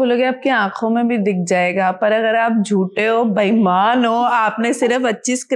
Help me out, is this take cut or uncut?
uncut